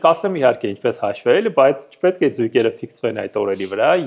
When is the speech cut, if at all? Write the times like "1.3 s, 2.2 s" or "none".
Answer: none